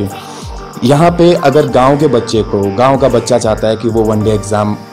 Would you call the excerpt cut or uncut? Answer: uncut